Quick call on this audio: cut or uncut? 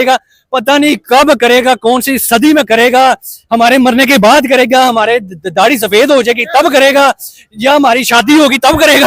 uncut